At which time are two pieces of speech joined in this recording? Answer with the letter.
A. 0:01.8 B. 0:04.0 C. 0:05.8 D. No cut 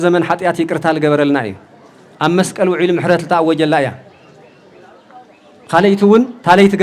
D